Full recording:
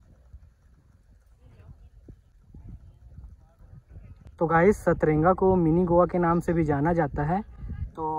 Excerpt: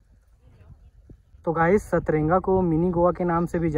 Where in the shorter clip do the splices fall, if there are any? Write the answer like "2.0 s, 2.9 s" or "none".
1.4 s